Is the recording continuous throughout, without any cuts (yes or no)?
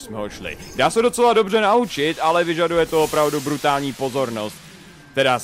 no